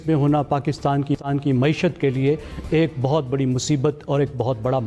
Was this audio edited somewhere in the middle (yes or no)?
no